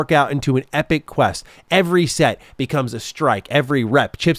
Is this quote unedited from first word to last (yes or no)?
yes